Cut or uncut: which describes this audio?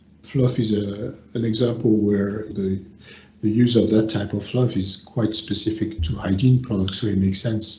cut